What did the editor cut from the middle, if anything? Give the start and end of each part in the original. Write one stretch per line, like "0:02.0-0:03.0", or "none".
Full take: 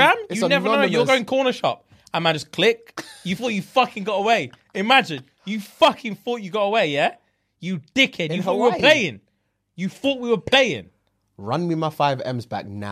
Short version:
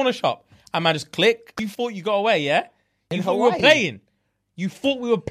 0:03.0-0:06.1
0:07.5-0:08.2